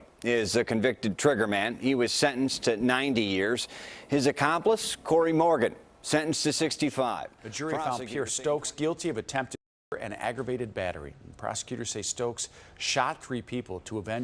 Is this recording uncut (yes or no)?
no